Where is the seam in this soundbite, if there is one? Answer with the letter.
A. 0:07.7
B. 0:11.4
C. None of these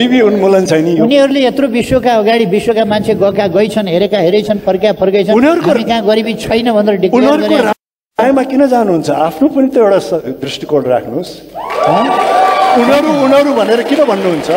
C